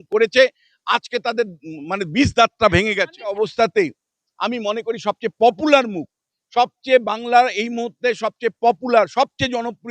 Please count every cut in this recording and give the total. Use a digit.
1